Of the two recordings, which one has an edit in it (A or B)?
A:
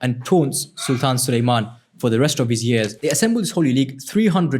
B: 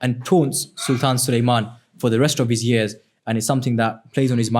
A